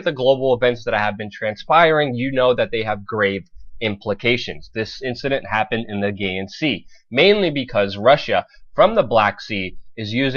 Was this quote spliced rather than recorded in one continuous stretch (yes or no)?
yes